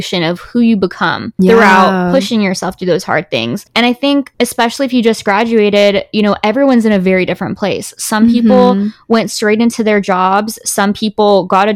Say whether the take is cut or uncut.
uncut